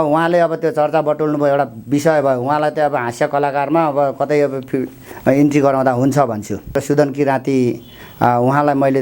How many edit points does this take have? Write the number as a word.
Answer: one